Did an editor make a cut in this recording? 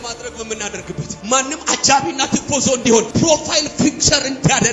yes; 2 cuts; at 1.1 s, 3.1 s

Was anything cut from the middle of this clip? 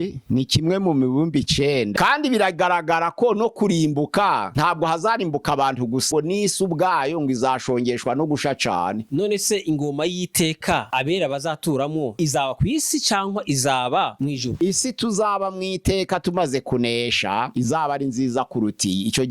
yes; 4 cuts; at 1.9 s, 6.1 s, 9.0 s, 14.5 s

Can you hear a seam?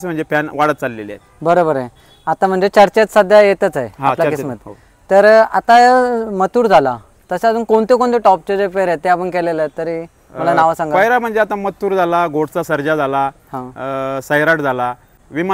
no; 0 cuts

